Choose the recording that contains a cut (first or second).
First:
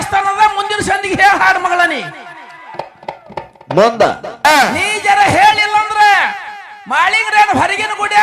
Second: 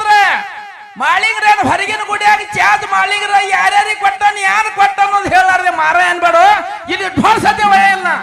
first